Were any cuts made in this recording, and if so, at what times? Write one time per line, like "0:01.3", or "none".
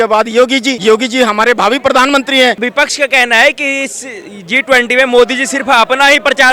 0:00.8
0:02.6